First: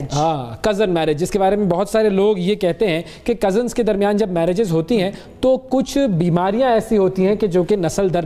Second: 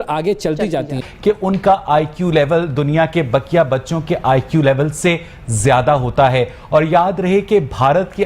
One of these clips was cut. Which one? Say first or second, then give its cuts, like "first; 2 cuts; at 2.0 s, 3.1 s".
second; 1 cut; at 1.1 s